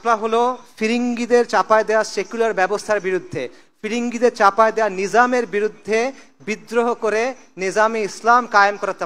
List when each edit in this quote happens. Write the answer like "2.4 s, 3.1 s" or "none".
none